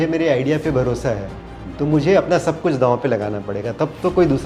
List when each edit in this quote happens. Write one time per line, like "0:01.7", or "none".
none